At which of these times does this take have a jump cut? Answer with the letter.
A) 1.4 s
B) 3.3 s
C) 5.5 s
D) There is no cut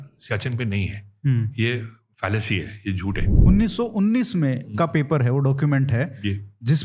B